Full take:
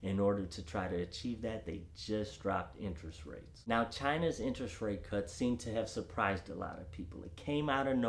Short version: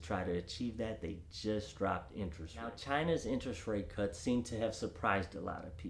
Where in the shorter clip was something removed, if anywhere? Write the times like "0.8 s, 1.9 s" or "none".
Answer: 2.8 s